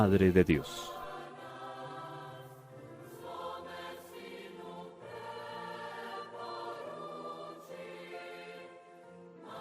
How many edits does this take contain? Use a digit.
1